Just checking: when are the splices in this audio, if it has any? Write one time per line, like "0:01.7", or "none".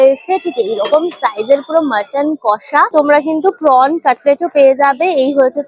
0:02.9